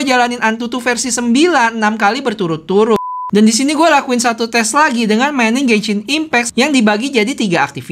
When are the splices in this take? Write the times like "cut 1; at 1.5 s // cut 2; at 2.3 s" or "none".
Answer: cut 1; at 3.1 s // cut 2; at 6.5 s